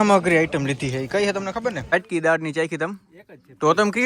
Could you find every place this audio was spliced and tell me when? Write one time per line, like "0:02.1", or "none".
0:01.9